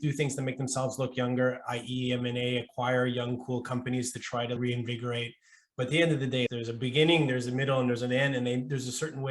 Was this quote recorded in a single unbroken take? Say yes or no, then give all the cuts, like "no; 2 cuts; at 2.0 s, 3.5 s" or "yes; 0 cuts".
no; 1 cut; at 6.5 s